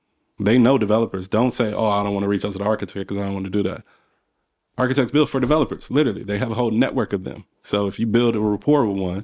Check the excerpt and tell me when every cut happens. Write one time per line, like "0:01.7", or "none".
none